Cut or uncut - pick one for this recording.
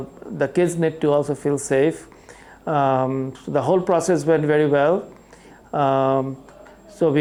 uncut